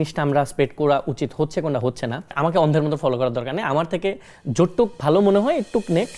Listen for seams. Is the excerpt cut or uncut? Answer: cut